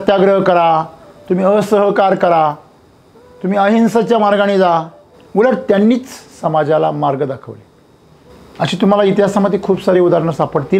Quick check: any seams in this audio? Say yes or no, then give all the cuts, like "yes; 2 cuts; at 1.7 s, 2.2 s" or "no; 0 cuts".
no; 0 cuts